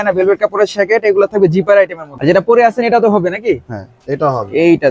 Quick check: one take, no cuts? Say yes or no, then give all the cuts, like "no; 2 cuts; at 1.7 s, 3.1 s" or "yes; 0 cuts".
no; 1 cut; at 2.1 s